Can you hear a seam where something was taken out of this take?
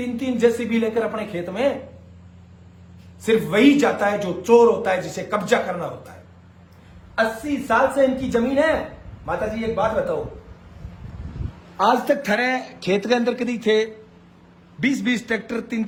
no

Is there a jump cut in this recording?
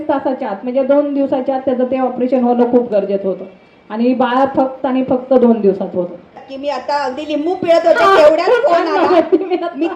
yes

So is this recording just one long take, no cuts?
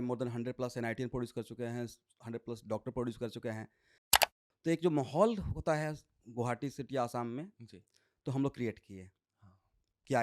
no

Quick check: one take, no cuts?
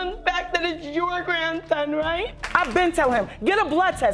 no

